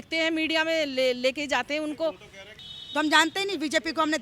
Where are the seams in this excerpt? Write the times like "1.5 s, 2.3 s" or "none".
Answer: 2.6 s

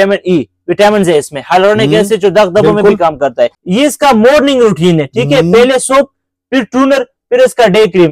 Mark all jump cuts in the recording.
3.6 s

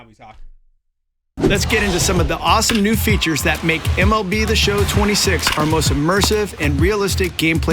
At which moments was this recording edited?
1.3 s

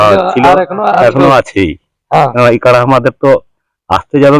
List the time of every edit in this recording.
2.2 s

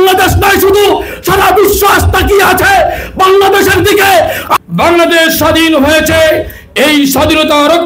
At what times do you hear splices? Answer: 4.5 s

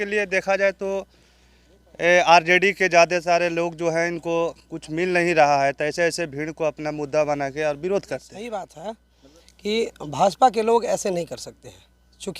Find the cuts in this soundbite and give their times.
8.3 s

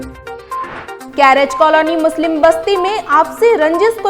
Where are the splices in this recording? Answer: none

